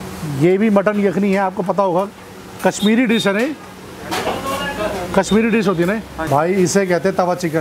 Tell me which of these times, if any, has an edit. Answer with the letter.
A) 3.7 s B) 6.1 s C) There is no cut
B